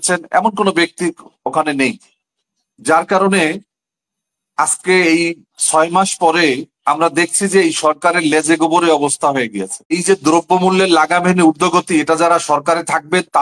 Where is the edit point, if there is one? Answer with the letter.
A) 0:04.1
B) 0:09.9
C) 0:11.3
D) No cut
B